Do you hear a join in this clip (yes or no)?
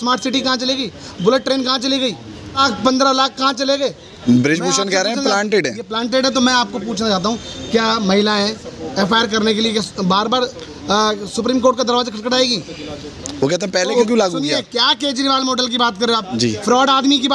yes